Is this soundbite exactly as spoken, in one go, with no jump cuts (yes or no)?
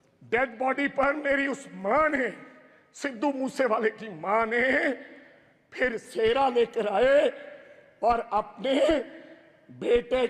yes